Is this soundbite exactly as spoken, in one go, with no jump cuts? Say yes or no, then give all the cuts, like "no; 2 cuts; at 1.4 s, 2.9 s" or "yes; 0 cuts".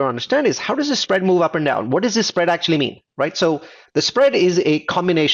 yes; 0 cuts